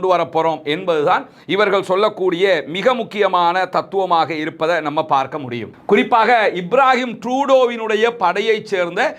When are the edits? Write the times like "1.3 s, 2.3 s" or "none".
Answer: 5.7 s